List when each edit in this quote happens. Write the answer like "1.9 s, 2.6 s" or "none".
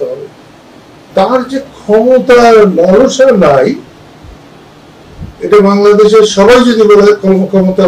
1.1 s